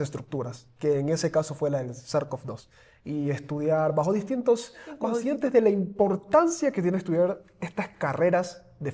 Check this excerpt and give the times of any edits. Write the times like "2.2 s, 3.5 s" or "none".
5.2 s